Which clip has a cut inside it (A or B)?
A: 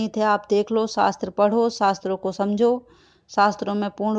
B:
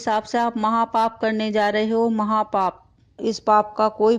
B